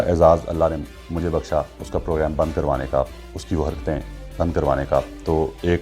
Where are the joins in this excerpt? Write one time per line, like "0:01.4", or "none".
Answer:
none